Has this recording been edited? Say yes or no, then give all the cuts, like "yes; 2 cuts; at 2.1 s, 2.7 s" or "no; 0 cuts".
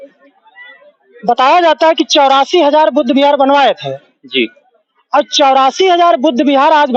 no; 0 cuts